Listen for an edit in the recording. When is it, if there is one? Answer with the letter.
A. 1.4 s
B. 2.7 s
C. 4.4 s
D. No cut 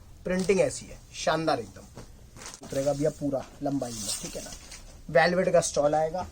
B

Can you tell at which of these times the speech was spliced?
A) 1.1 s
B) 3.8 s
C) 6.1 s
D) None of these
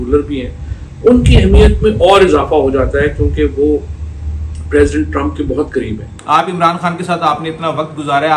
C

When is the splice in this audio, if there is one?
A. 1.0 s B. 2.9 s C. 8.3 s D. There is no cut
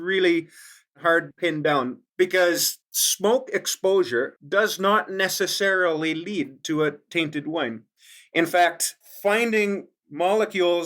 A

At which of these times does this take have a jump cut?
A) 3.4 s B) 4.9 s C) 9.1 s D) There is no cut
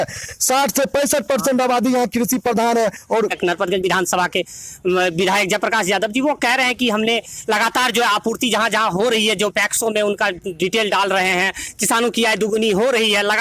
A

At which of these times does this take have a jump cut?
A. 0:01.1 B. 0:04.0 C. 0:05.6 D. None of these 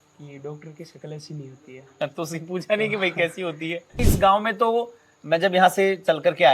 B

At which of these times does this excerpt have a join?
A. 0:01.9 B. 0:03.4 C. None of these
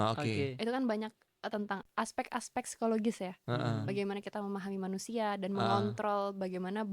A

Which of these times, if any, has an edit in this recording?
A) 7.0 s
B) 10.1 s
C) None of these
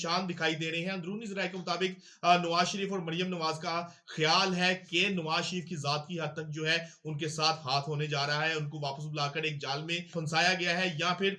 B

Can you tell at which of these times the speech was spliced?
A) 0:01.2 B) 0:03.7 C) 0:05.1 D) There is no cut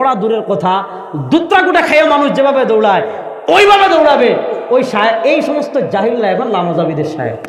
D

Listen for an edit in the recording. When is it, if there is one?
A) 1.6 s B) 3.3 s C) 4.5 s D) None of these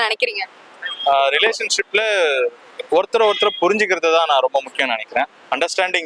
D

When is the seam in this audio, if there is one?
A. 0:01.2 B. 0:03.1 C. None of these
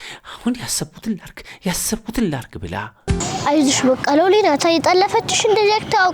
B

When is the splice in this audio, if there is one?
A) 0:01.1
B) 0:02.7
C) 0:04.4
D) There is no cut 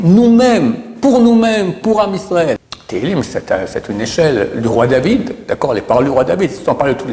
B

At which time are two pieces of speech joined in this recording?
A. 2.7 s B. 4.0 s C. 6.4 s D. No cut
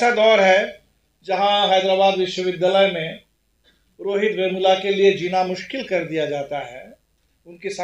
D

